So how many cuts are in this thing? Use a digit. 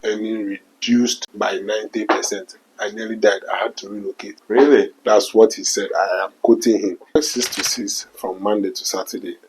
3